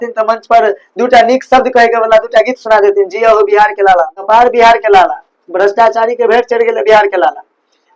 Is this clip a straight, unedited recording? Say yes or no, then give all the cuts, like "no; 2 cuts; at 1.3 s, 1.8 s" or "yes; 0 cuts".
no; 1 cut; at 4.2 s